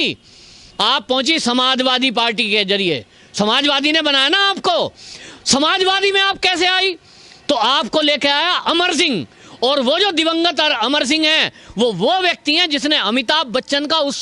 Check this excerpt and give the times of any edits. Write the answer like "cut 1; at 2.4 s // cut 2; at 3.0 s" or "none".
none